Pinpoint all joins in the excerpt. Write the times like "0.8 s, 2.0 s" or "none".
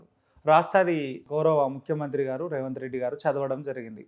1.2 s